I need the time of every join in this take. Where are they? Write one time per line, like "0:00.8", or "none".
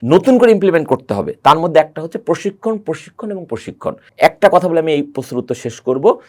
none